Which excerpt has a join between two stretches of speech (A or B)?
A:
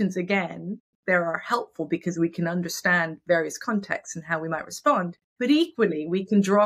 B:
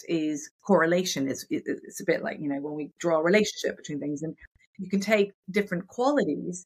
A